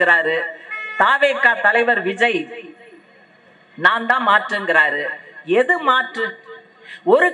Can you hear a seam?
no; 0 cuts

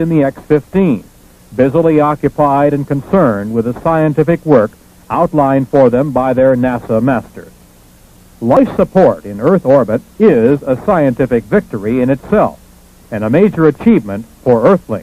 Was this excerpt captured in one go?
no; 1 cut; at 13.8 s

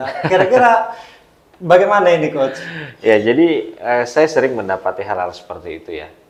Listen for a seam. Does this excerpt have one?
no; 0 cuts

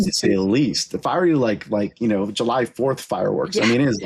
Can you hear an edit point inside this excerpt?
no; 0 cuts

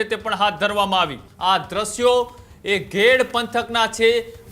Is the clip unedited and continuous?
no; 1 cut; at 1.2 s

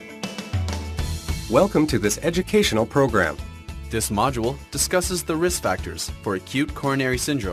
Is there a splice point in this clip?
no; 0 cuts

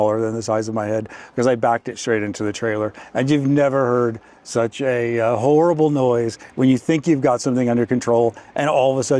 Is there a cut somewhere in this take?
no; 0 cuts

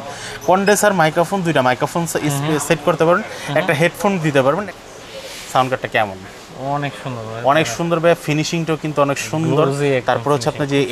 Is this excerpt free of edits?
no; 1 cut; at 4.6 s

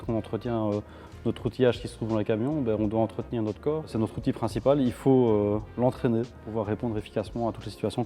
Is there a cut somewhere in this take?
no; 0 cuts

